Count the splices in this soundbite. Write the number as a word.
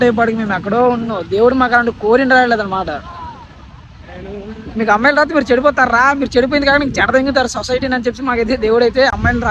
zero